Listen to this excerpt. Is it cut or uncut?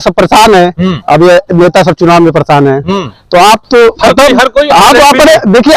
uncut